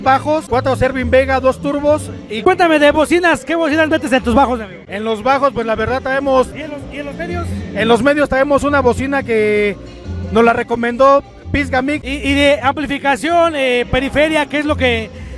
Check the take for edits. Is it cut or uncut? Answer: cut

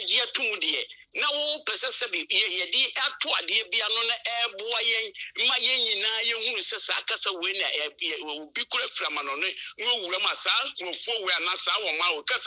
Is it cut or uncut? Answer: uncut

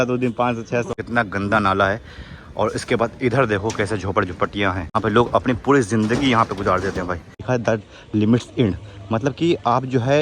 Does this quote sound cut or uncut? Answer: cut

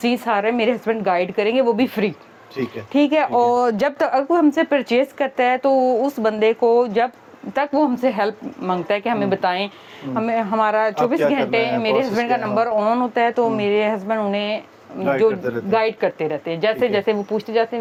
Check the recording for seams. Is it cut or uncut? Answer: uncut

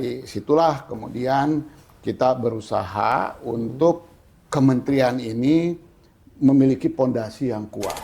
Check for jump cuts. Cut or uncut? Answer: uncut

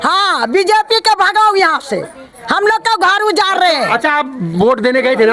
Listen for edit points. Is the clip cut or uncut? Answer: uncut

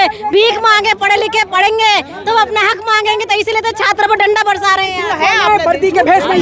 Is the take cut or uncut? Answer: cut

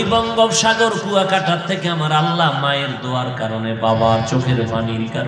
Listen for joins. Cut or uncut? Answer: uncut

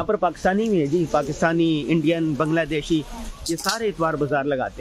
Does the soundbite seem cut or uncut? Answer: uncut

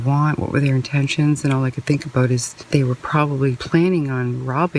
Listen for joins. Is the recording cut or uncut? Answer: cut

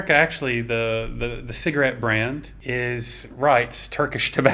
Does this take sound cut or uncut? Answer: cut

